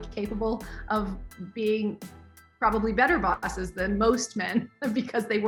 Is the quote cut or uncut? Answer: uncut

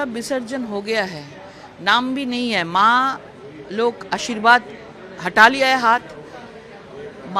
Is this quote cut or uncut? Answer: uncut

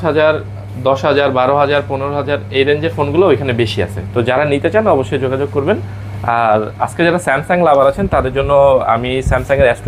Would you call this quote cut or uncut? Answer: uncut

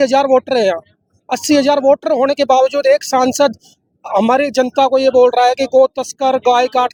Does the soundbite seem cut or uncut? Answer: uncut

